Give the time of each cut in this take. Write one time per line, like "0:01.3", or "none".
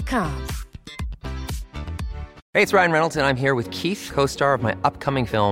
0:02.4